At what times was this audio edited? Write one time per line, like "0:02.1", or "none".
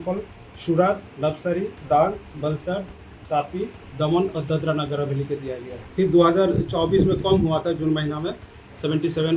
0:05.7